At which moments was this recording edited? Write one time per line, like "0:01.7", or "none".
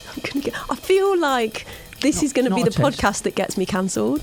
none